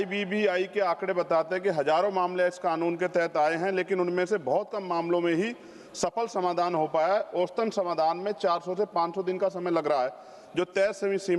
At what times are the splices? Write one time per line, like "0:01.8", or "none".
none

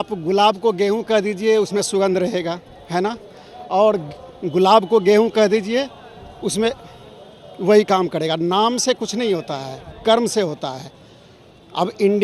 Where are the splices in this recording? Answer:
none

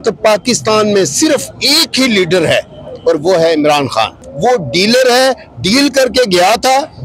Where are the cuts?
0:04.2

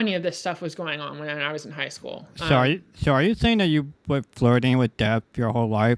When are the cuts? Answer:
none

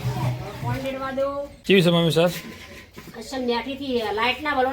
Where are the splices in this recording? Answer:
0:01.5

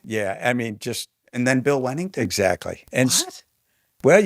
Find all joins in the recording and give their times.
0:02.8

